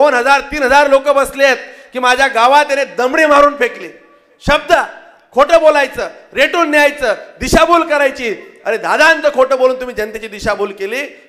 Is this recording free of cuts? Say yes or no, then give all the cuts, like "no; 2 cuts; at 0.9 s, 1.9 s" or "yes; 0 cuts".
yes; 0 cuts